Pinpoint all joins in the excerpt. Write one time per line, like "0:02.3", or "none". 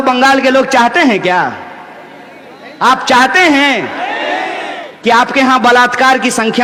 none